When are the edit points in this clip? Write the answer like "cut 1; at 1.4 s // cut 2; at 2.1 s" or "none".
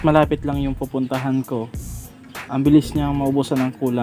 none